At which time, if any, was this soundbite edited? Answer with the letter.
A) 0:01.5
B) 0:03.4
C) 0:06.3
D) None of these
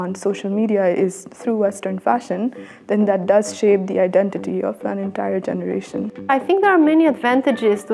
C